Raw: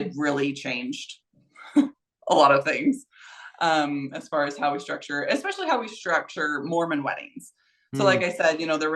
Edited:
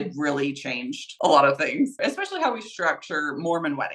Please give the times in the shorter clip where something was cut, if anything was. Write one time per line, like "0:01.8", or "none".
0:01.0
0:01.9